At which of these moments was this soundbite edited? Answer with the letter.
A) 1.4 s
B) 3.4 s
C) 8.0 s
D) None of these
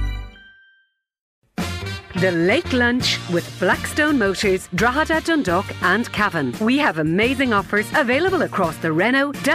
A